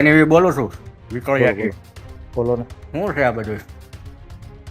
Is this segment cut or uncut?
uncut